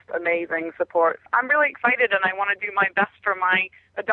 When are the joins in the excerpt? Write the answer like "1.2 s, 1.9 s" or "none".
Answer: 1.2 s

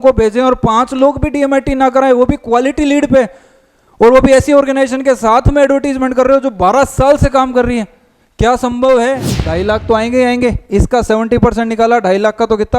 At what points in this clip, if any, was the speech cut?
9.4 s

